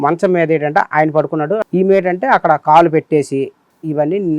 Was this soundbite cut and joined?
yes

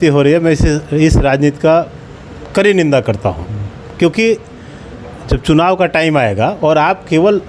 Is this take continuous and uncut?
yes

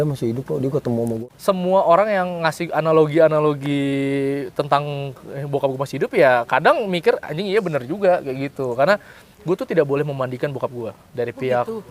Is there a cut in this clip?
yes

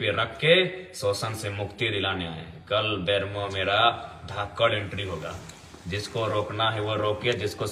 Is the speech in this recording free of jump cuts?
yes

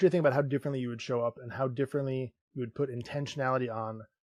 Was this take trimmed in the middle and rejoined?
no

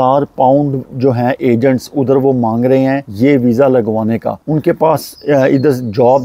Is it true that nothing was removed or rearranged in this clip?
yes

